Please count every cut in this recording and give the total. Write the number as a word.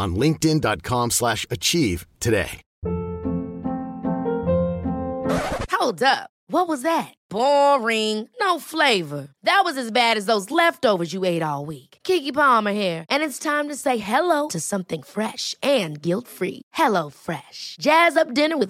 one